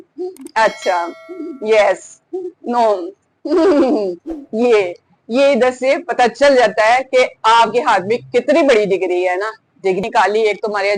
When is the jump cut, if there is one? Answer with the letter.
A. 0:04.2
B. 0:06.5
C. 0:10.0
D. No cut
C